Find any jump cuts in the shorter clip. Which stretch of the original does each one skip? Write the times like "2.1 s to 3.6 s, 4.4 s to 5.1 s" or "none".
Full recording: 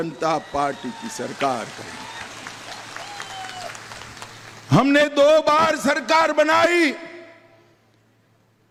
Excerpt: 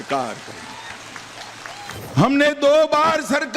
3.3 s to 4.5 s